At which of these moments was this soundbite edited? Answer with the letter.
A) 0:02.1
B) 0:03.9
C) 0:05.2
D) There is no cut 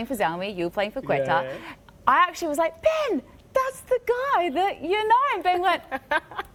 D